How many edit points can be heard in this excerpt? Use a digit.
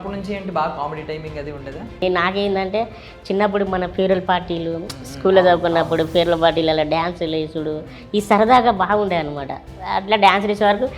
1